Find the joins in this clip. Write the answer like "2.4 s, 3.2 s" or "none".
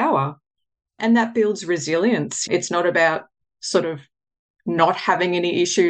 0.9 s, 2.4 s